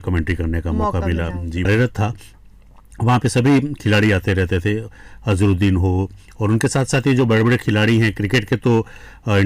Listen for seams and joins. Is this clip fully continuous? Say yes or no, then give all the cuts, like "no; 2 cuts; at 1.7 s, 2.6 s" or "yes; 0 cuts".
yes; 0 cuts